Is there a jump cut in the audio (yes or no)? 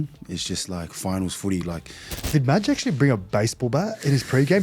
yes